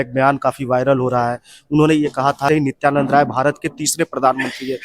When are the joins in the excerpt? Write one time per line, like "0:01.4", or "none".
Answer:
0:02.5